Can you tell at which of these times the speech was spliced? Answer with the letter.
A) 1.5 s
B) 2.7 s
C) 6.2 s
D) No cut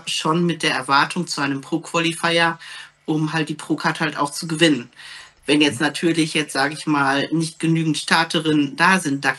D